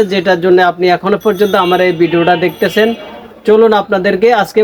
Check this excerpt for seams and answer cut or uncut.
uncut